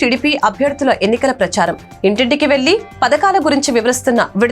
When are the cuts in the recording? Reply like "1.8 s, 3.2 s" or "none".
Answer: none